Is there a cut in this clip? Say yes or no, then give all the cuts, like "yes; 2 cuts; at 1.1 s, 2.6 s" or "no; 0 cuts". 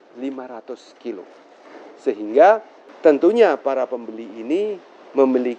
no; 0 cuts